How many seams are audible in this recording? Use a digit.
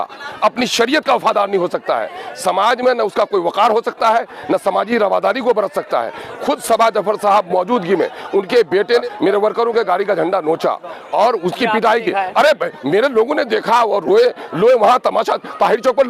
1